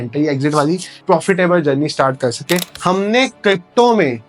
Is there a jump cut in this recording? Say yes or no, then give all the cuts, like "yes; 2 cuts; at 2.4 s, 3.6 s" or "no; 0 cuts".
yes; 2 cuts; at 1.0 s, 2.7 s